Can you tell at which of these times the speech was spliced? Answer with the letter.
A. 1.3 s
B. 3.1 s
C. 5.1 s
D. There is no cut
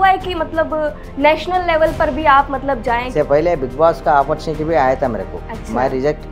B